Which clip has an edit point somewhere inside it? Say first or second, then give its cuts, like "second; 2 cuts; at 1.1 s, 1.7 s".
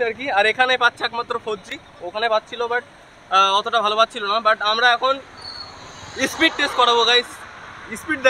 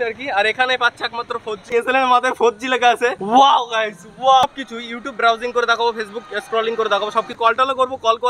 second; 4 cuts; at 1.7 s, 3.2 s, 4.4 s, 7.3 s